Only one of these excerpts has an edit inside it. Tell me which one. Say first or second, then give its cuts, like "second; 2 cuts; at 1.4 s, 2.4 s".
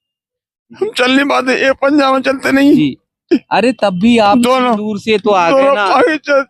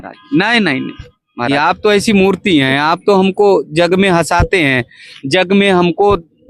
second; 1 cut; at 1.5 s